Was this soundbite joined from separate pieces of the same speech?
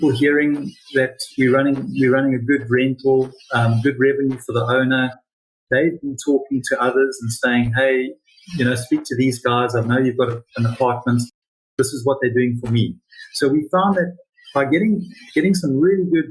no; 0 cuts

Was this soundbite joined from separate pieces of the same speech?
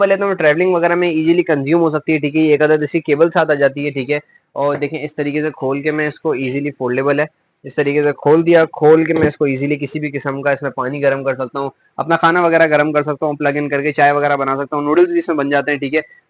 no; 0 cuts

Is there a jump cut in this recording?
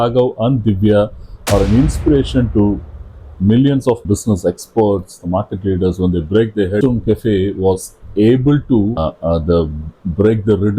yes; 3 cuts; at 4.0 s, 6.8 s, 9.0 s

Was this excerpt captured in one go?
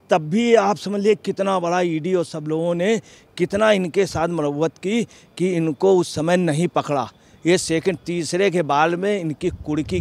yes; 0 cuts

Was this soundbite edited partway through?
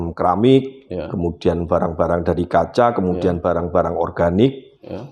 no; 0 cuts

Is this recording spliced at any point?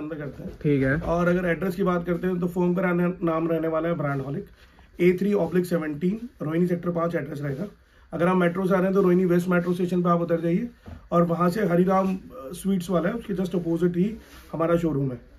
no; 0 cuts

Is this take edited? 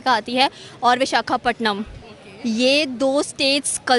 no; 0 cuts

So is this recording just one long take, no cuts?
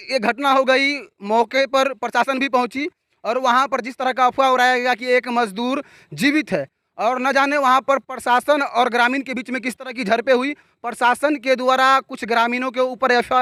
yes; 0 cuts

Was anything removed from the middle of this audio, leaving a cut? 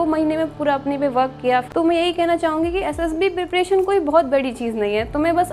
yes; 1 cut; at 1.7 s

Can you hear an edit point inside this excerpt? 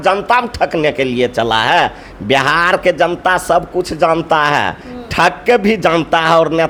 no; 0 cuts

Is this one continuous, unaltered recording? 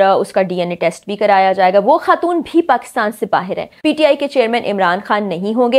no; 1 cut; at 3.7 s

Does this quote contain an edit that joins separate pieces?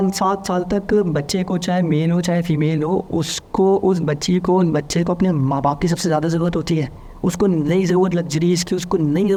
no; 0 cuts

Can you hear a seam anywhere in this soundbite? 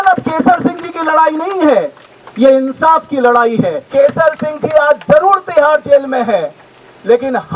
yes; 1 cut; at 3.8 s

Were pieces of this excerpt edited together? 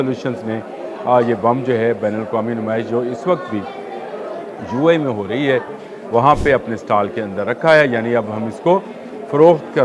no; 0 cuts

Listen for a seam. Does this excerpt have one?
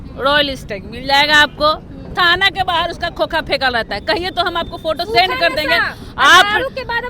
no; 0 cuts

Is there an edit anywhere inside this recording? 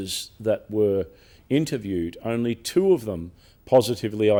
no; 0 cuts

